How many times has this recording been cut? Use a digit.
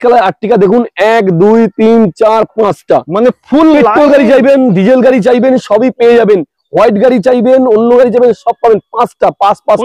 0